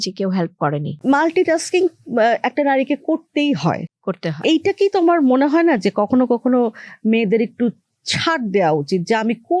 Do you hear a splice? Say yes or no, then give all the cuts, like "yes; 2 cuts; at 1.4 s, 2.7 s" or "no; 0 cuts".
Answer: yes; 1 cut; at 0.9 s